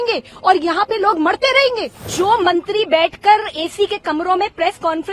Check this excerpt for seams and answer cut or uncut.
cut